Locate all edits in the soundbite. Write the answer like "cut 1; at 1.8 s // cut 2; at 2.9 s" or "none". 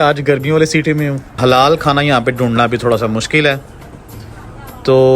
cut 1; at 1.3 s